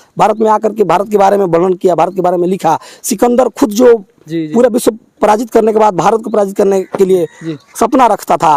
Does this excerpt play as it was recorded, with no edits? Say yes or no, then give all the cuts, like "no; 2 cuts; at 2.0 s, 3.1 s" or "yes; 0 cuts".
yes; 0 cuts